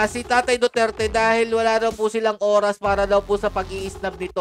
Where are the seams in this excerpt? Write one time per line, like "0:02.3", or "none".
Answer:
none